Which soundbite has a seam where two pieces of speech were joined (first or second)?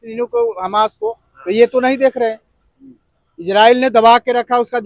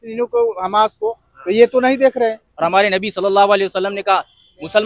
second